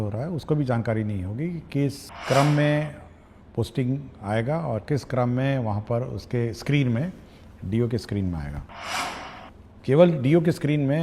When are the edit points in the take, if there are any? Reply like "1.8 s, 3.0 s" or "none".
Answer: 2.1 s